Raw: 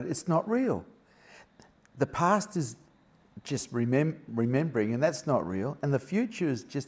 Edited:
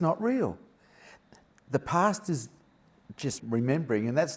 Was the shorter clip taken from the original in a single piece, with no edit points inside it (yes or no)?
no